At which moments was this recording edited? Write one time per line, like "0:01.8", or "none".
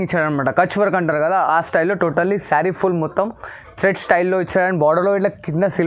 none